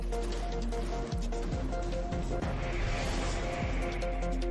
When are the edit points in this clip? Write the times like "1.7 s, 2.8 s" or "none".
none